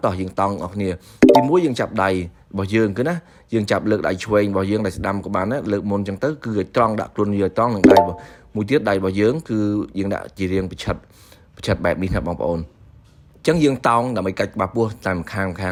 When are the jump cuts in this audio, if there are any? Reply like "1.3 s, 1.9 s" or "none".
none